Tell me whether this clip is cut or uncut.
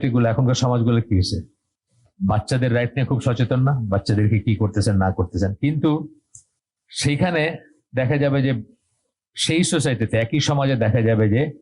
uncut